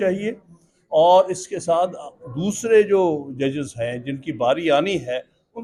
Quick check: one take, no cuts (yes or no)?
yes